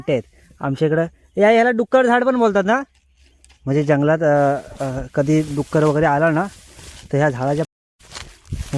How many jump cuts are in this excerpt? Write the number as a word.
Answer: one